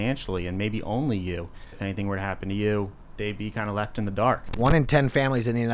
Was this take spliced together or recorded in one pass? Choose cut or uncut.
cut